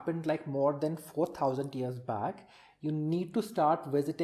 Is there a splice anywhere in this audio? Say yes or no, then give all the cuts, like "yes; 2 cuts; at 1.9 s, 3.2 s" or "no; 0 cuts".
no; 0 cuts